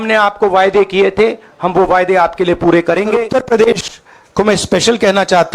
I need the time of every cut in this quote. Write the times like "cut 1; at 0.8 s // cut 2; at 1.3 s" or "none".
cut 1; at 3.3 s